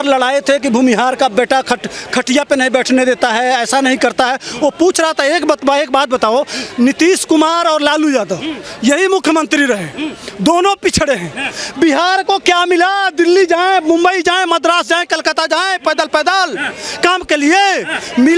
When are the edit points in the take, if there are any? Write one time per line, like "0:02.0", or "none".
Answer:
none

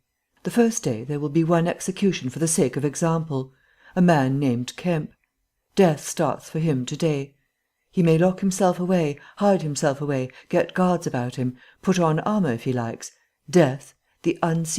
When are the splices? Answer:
0:02.5

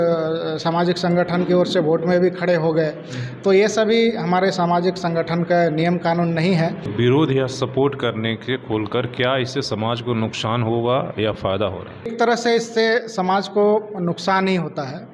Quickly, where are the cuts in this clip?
0:06.9
0:12.1

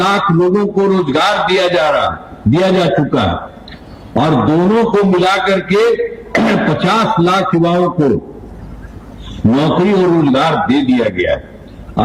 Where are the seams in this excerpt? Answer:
none

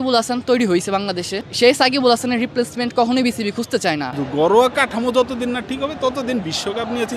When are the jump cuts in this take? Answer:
0:01.4
0:04.1

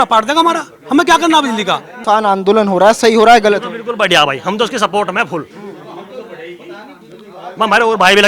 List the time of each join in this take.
0:01.9

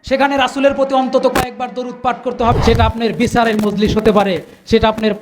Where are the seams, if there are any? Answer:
0:02.5

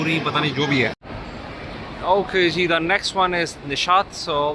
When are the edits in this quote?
0:01.0

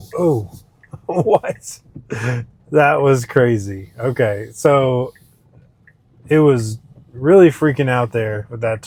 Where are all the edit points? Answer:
none

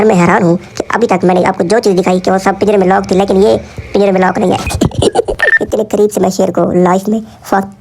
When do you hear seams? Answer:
0:05.4

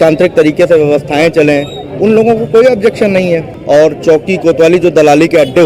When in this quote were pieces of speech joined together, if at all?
0:03.5

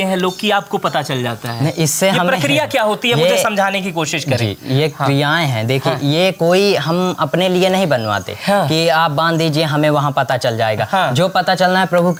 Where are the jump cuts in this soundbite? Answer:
none

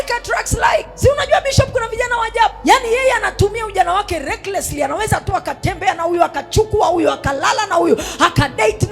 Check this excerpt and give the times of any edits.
0:00.9
0:02.6

